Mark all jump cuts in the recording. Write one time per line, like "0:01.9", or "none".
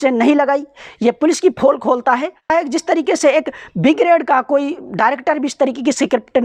0:02.5